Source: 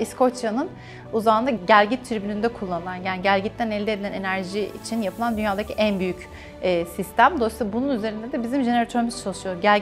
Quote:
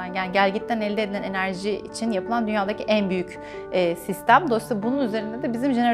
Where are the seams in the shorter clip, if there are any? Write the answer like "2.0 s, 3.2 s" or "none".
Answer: none

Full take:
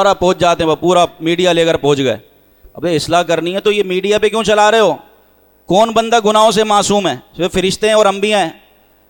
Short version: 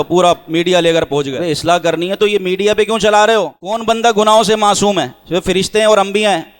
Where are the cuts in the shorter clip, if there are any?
1.3 s, 3.8 s

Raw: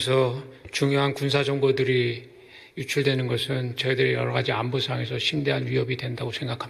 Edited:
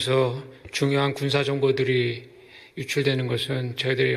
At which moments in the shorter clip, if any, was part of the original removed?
none

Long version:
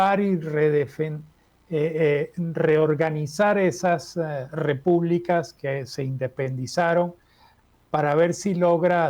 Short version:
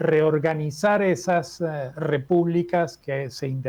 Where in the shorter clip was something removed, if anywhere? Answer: none

